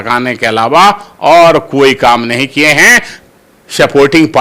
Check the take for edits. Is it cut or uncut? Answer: cut